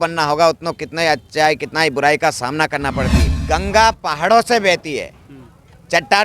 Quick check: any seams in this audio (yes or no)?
yes